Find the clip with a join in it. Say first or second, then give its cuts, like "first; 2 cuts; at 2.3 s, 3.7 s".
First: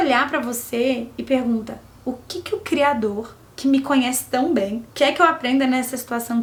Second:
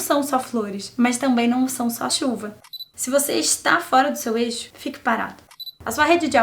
second; 2 cuts; at 2.6 s, 5.4 s